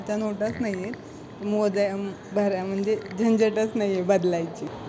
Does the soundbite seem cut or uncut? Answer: uncut